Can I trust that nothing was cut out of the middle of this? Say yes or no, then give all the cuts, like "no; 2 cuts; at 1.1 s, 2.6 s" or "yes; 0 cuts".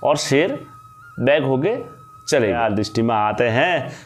no; 1 cut; at 2.6 s